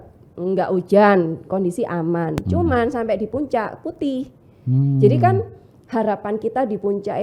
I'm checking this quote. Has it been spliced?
no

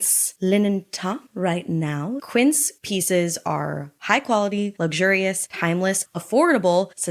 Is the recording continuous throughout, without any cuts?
no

